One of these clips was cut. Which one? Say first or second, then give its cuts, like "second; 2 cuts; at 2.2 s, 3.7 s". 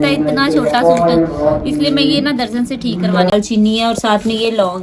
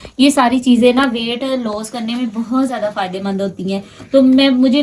first; 1 cut; at 3.3 s